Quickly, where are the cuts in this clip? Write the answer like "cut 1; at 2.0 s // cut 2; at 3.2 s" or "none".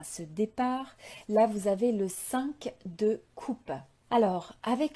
cut 1; at 3.9 s